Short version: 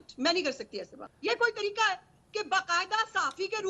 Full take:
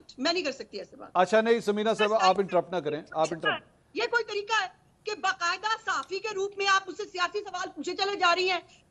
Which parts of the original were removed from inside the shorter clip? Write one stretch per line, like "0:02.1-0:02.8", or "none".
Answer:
0:01.0-0:03.7